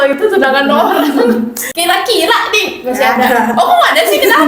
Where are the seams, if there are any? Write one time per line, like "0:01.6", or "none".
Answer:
0:01.7